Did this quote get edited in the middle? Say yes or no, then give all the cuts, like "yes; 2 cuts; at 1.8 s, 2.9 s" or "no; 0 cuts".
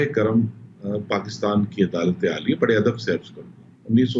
no; 0 cuts